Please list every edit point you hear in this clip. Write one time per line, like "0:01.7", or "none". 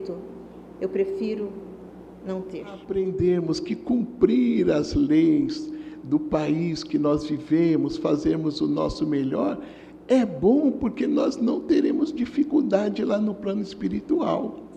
0:02.8